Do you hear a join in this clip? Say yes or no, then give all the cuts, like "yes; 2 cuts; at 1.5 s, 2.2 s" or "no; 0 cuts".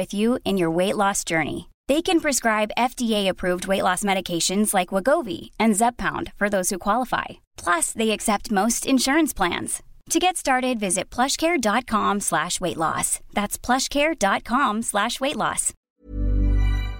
yes; 1 cut; at 15.9 s